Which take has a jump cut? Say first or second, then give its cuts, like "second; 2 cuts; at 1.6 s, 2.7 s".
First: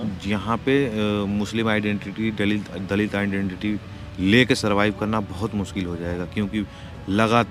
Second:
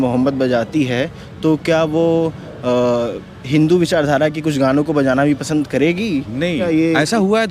second; 1 cut; at 6.6 s